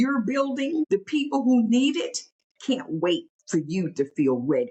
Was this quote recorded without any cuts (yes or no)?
no